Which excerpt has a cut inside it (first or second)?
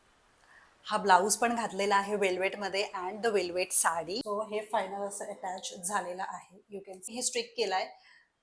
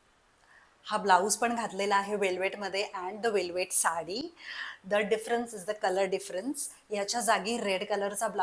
first